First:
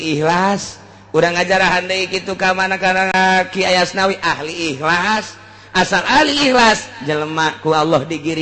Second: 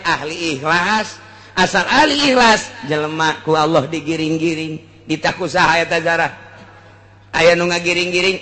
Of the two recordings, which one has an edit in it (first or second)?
first